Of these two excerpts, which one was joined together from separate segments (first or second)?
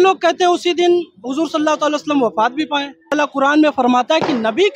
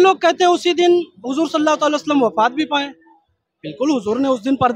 first